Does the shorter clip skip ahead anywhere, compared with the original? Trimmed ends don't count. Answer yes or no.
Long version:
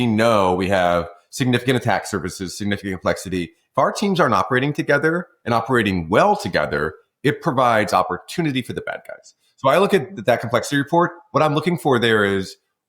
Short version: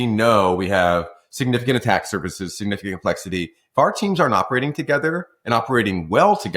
no